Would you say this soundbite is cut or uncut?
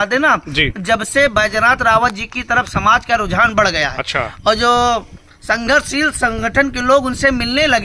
uncut